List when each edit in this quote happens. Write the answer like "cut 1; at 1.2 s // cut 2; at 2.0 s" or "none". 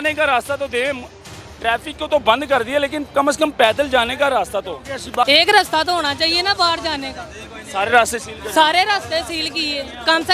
cut 1; at 5.2 s